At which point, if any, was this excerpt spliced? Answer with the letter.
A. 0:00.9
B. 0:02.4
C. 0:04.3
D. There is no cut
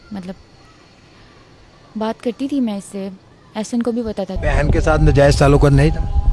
C